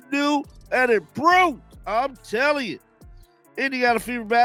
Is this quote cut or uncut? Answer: uncut